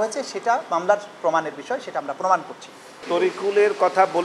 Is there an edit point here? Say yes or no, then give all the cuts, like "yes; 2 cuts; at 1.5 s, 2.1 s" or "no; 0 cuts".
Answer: yes; 1 cut; at 3.0 s